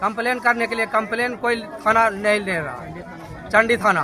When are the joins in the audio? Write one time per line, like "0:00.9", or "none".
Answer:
none

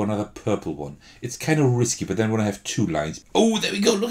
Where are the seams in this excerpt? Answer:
0:03.2

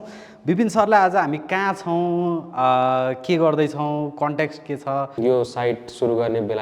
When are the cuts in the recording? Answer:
0:05.2

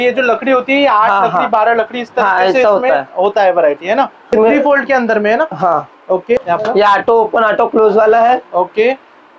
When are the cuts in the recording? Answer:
0:04.3
0:06.4

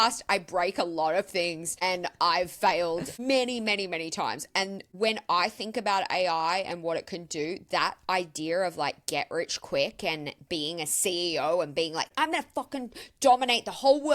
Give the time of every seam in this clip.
0:01.7
0:03.1
0:04.8
0:12.1

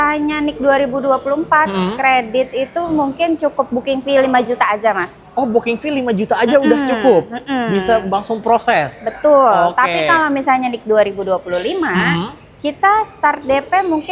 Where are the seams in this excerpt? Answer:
none

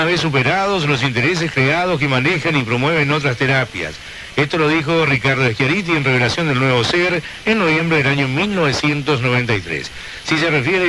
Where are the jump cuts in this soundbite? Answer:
0:05.8

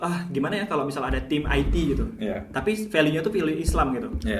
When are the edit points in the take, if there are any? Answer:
none

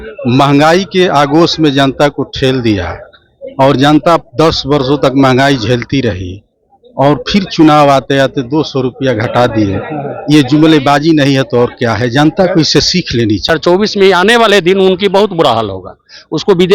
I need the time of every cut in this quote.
0:13.5

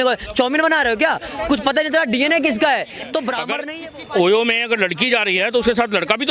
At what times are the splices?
0:03.5

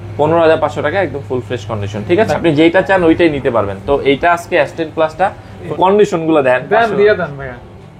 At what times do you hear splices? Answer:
0:02.4
0:05.7

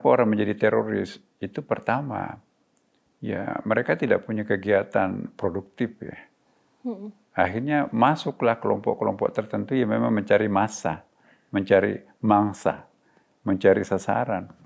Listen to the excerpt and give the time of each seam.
none

